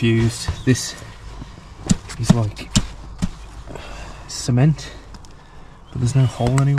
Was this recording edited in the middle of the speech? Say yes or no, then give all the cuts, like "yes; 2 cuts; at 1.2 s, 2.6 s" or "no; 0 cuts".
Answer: no; 0 cuts